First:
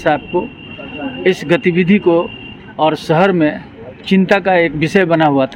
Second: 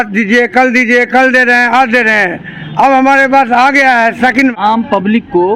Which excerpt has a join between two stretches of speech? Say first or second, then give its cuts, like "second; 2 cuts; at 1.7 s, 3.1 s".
second; 1 cut; at 4.6 s